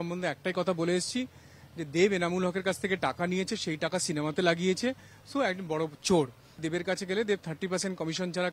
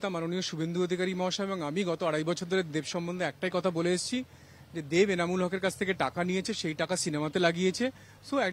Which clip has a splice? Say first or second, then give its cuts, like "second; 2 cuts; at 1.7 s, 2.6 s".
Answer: first; 1 cut; at 6.6 s